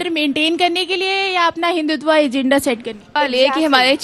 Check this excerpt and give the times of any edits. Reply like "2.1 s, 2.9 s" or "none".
3.1 s